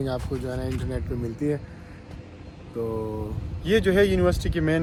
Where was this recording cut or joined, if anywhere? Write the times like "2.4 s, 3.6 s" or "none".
none